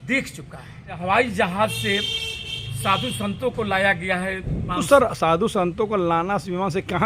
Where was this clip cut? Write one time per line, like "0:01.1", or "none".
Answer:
0:01.0
0:04.7